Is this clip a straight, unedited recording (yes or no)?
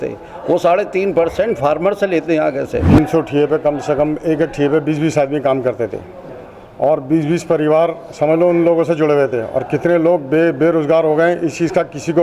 no